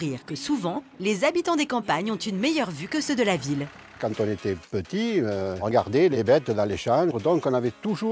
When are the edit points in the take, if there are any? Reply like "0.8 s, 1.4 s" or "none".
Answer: 3.9 s, 5.7 s, 7.2 s